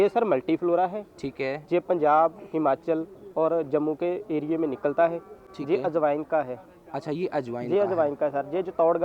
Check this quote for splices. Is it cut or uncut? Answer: uncut